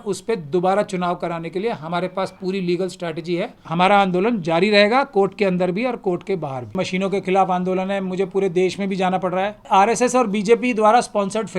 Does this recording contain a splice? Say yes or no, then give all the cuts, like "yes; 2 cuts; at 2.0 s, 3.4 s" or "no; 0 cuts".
yes; 3 cuts; at 3.6 s, 6.7 s, 9.7 s